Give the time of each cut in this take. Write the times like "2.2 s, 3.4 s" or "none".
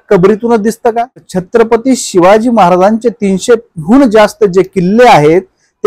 1.4 s